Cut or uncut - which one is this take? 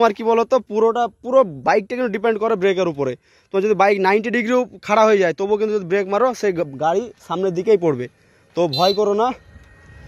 uncut